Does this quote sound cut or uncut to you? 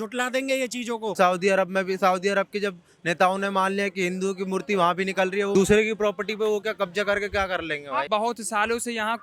cut